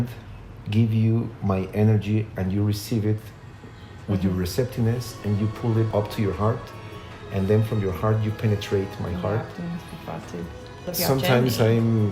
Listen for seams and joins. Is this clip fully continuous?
no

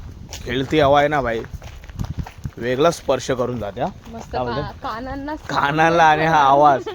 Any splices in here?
no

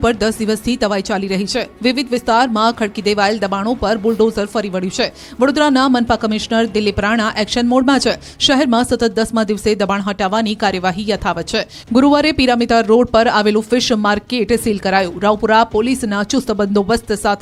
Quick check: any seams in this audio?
no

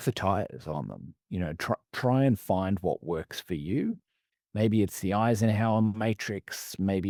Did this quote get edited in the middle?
no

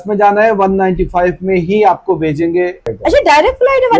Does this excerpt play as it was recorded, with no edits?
no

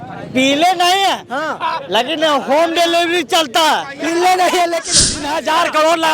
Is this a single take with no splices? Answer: no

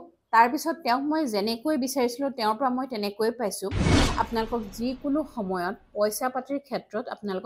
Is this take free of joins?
no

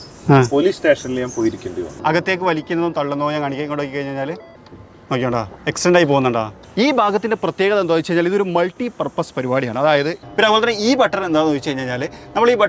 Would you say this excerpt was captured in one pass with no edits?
no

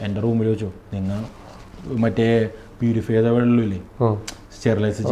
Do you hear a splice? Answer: no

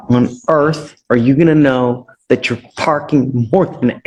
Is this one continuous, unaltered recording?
yes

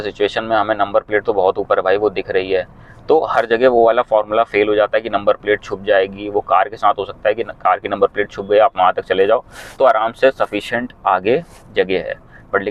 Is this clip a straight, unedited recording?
yes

